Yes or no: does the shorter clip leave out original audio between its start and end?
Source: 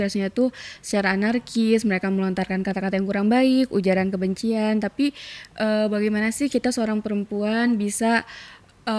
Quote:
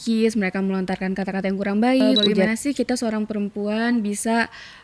yes